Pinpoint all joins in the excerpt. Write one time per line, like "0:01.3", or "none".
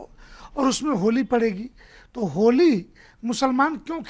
none